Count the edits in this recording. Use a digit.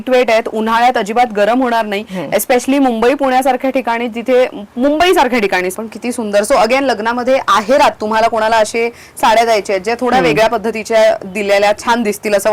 1